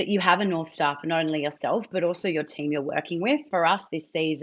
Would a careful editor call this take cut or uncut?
cut